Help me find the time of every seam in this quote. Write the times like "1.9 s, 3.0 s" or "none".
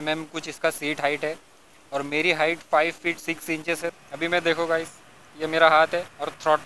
3.9 s